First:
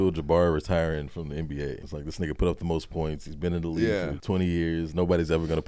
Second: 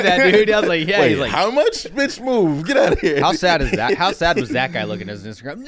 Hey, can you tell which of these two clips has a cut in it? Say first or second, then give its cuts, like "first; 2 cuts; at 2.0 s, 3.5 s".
first; 2 cuts; at 1.9 s, 4.2 s